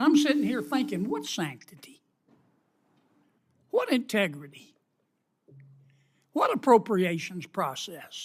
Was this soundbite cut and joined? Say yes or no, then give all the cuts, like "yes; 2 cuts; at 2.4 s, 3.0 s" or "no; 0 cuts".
no; 0 cuts